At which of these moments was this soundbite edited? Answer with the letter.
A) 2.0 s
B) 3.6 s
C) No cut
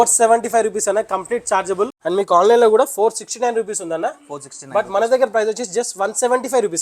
A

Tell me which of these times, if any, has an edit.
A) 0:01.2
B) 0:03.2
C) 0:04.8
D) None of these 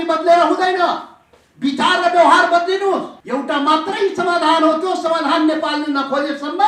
B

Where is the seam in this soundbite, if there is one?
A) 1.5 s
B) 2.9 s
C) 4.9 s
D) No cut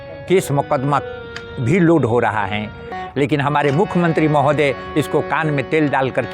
B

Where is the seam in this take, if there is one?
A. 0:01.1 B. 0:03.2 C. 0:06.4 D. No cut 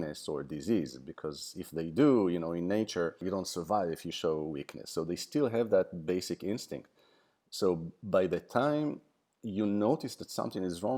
B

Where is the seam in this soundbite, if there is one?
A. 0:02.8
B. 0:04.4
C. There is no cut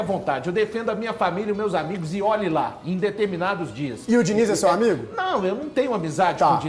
C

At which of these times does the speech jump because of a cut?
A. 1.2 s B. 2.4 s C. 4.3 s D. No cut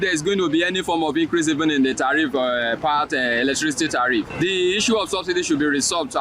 C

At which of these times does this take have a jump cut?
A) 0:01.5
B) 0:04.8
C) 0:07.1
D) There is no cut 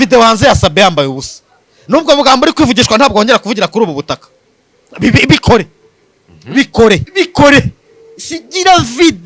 C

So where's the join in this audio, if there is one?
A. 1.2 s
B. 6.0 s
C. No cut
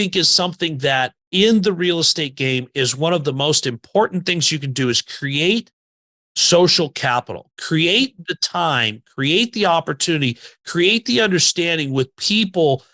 A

